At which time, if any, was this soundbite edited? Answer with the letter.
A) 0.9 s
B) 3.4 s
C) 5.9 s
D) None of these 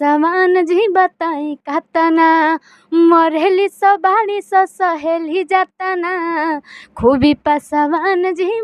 D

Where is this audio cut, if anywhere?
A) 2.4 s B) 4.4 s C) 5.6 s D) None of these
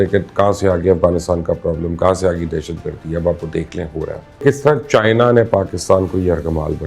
B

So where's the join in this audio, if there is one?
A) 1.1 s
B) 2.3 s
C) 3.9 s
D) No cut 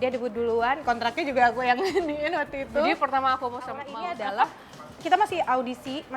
C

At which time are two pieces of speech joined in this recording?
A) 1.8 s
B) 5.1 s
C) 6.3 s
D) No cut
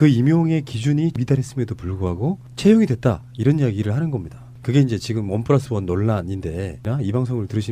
A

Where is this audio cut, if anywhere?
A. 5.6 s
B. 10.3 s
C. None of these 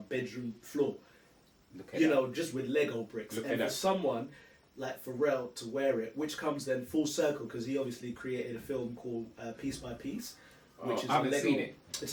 C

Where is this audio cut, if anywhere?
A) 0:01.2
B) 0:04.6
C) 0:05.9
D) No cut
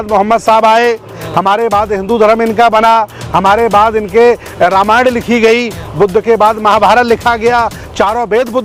D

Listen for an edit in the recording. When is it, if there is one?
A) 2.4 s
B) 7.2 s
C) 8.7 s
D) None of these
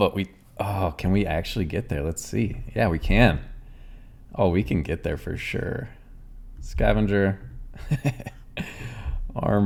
D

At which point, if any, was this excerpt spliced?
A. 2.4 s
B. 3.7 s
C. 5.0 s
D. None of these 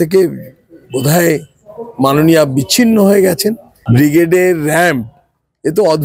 B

